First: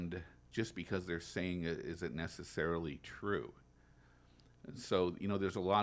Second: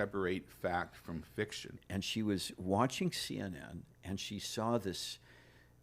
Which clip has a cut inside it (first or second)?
second